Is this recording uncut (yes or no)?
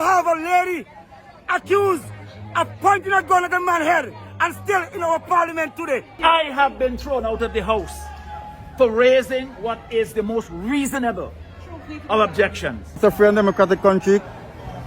no